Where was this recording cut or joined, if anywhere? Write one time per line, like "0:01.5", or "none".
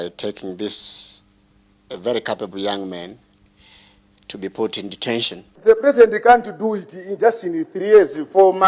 0:05.5

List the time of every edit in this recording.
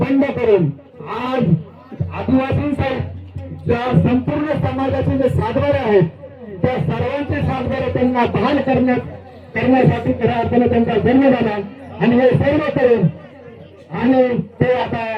none

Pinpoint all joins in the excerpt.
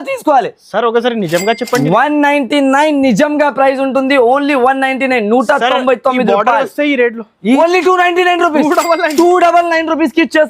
0:07.6

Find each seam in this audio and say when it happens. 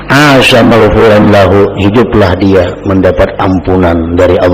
none

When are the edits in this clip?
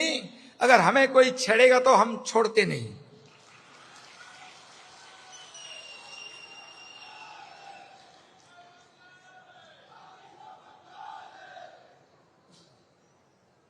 none

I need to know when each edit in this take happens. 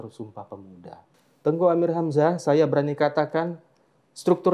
0:01.2

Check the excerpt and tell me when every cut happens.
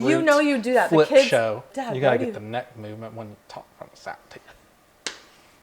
0:01.7

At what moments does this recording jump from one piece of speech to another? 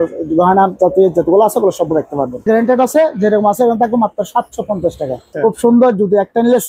0:02.4
0:05.3

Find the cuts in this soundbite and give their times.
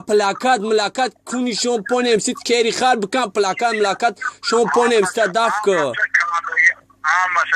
none

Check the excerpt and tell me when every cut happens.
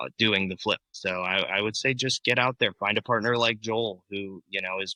none

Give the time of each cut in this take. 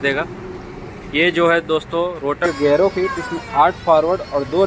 0:02.4

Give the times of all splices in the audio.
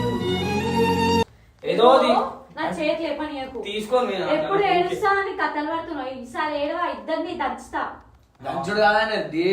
0:01.2

